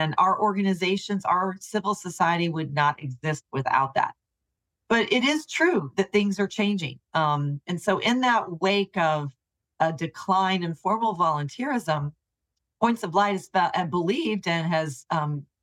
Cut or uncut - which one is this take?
uncut